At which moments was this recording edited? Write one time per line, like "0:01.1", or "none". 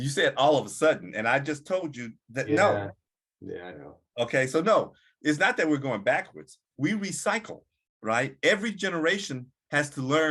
none